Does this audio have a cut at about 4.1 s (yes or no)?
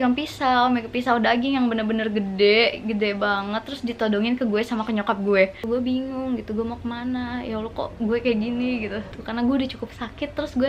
no